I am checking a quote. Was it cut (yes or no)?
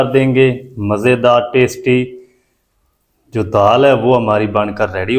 no